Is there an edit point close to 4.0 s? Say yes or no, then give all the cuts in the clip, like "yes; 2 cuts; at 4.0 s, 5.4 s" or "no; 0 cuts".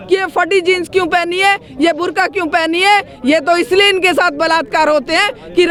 no; 0 cuts